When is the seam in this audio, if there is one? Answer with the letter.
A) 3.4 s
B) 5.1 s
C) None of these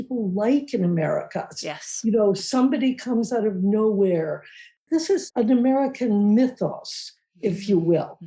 B